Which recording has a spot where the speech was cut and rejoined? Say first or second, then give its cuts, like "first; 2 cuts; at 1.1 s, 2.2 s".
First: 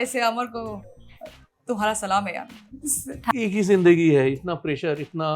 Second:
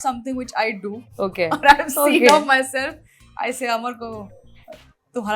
first; 1 cut; at 3.3 s